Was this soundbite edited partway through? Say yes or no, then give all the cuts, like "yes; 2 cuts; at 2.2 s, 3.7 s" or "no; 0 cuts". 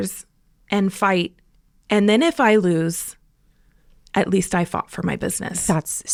no; 0 cuts